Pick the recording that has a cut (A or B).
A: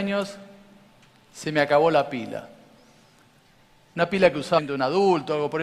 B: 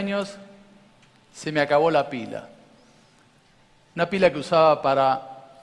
B